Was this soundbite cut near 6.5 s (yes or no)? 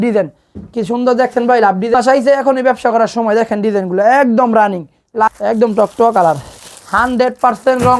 no